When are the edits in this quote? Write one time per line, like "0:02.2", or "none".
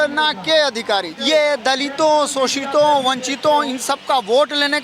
0:01.1